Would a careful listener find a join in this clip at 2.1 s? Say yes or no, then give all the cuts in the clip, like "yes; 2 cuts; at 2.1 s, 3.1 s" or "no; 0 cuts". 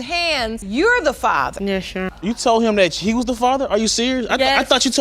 yes; 1 cut; at 2.1 s